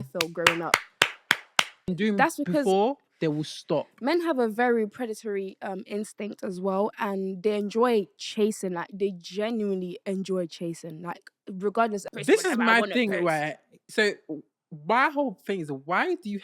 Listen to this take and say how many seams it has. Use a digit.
2